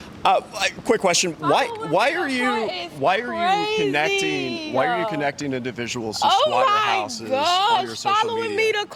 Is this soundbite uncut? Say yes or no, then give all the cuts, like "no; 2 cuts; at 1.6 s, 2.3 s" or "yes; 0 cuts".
yes; 0 cuts